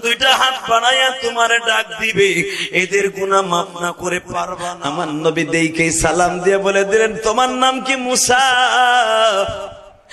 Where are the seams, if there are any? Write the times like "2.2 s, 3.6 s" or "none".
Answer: 4.8 s

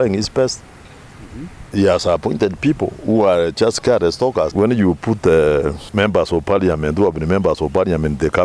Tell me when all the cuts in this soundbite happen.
4.5 s, 5.8 s

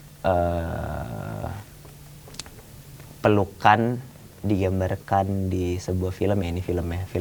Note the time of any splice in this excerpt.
none

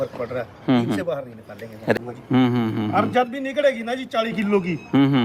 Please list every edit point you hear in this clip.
1.9 s

